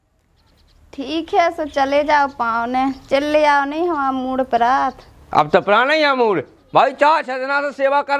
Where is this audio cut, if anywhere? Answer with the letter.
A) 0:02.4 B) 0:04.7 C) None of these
C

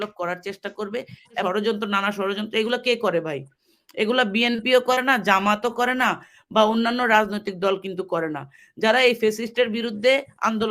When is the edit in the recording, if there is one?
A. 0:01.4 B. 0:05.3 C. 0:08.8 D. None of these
A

